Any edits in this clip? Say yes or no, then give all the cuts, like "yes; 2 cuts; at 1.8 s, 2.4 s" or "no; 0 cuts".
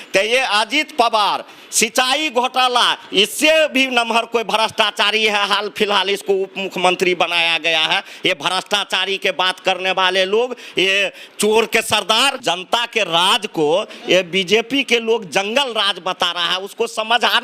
yes; 1 cut; at 12.4 s